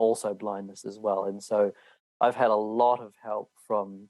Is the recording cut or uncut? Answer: uncut